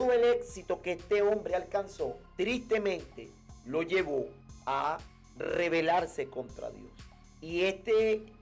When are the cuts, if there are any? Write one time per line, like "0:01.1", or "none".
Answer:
0:02.2